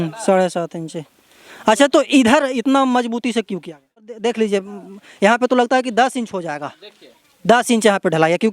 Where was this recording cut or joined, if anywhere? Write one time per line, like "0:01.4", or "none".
0:04.1